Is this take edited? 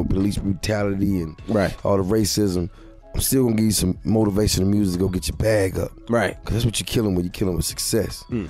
no; 0 cuts

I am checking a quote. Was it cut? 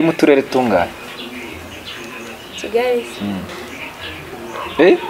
yes; 1 cut; at 3.5 s

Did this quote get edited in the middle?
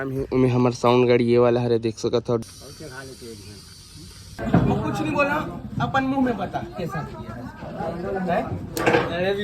yes; 2 cuts; at 2.5 s, 4.4 s

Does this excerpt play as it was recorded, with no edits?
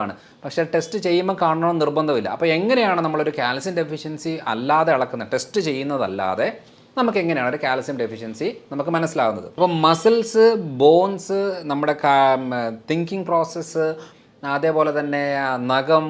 no; 1 cut; at 9.6 s

